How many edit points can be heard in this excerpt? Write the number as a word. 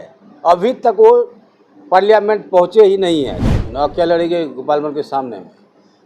one